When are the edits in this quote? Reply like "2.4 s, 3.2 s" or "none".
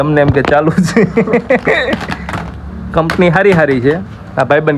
none

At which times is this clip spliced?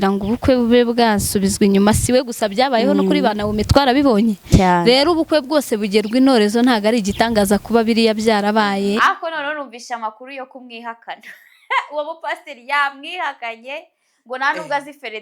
9.0 s

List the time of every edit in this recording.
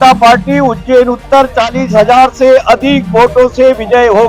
none

